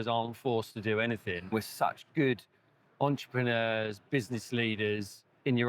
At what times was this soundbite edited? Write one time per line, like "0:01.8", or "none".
0:01.5